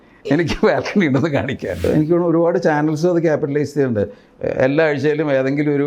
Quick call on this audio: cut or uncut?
cut